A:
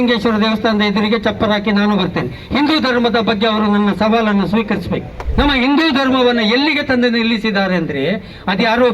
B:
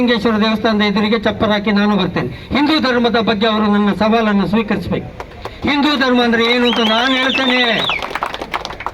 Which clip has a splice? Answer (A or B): A